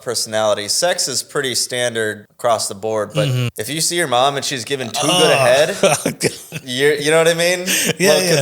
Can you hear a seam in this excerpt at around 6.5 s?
yes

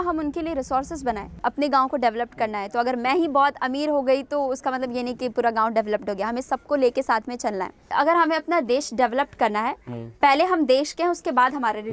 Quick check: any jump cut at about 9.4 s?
no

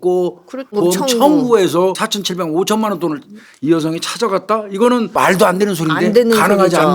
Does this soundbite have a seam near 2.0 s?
yes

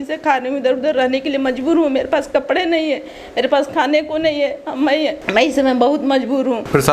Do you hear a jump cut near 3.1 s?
no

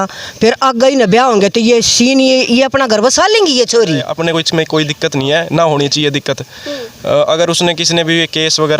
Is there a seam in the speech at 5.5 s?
no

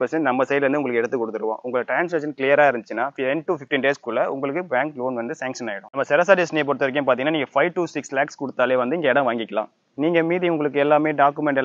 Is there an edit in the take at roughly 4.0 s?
no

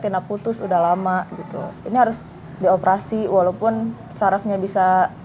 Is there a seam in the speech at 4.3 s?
no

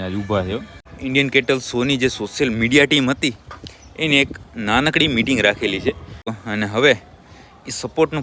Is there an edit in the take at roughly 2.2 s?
no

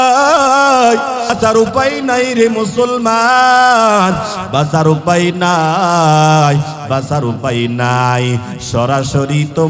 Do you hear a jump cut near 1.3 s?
yes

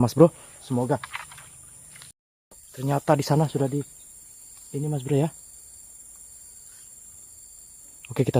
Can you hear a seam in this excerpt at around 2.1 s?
yes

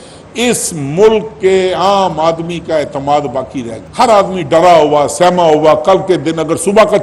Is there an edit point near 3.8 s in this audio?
yes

